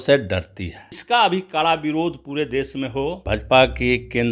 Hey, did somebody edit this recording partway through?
yes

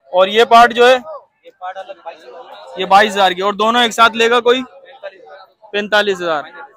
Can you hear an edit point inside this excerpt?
no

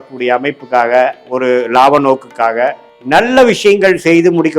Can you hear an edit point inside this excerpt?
yes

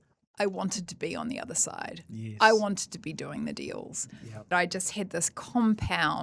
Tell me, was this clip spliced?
yes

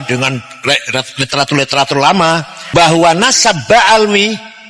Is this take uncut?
no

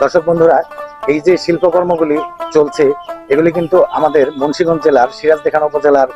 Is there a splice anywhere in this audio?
no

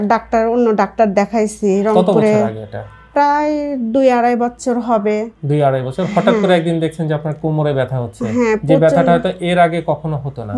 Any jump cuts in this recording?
no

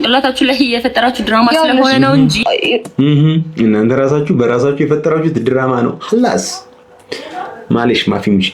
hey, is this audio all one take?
yes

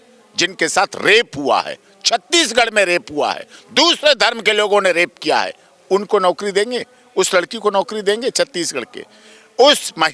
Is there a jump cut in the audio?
no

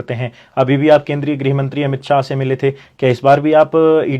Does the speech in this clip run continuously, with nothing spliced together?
yes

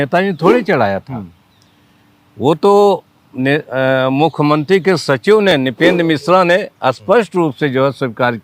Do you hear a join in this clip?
no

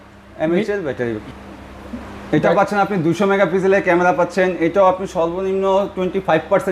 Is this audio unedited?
no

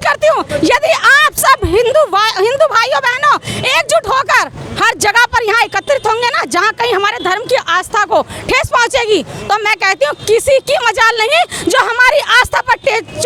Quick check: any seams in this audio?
no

